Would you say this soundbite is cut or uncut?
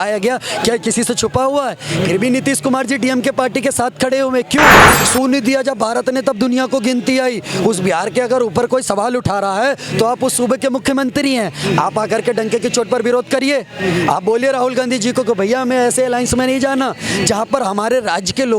cut